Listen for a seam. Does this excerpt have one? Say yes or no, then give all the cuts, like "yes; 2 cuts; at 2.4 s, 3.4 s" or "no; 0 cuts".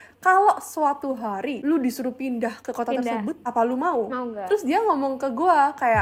no; 0 cuts